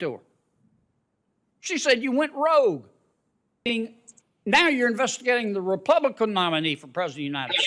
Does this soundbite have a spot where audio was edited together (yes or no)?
yes